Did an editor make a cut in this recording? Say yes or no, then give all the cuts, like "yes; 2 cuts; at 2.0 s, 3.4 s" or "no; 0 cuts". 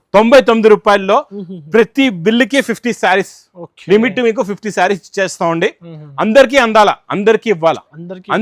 no; 0 cuts